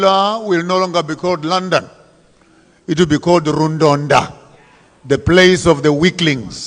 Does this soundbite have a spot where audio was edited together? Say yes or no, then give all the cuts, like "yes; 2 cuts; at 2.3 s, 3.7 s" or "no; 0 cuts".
no; 0 cuts